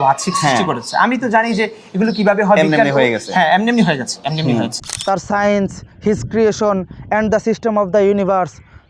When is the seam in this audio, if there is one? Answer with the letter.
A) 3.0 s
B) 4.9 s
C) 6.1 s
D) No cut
B